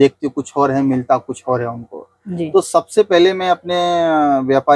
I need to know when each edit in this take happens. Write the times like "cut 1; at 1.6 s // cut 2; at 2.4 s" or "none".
none

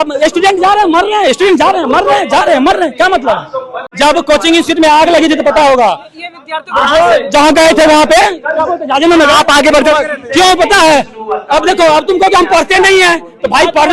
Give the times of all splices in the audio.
cut 1; at 3.8 s

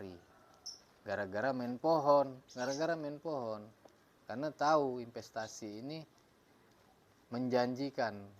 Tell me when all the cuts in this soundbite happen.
none

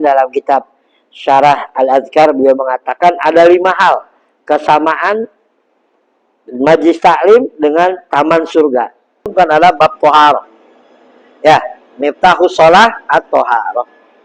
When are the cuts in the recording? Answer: cut 1; at 9.3 s

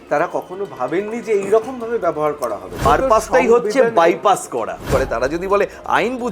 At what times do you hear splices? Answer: cut 1; at 2.8 s // cut 2; at 4.9 s

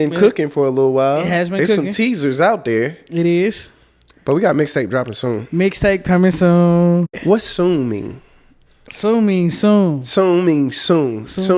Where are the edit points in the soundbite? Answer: cut 1; at 7.1 s

